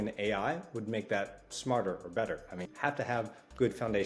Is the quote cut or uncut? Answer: cut